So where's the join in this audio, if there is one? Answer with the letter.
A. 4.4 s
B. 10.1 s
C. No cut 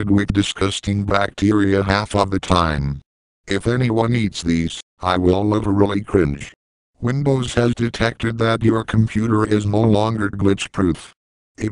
B